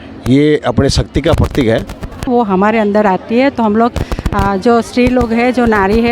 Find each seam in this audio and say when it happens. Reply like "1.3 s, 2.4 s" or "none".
2.3 s